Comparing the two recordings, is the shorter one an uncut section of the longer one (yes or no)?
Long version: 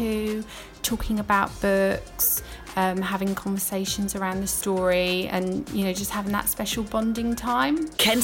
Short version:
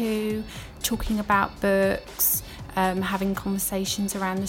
yes